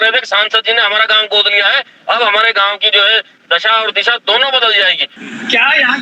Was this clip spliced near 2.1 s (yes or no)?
no